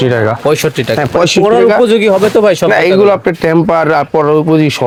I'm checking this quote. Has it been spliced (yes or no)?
no